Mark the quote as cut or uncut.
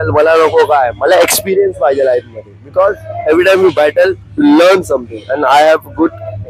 uncut